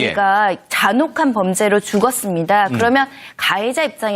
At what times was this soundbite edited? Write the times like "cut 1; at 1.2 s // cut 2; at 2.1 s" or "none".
cut 1; at 2.0 s